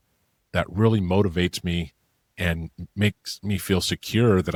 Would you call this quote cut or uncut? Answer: uncut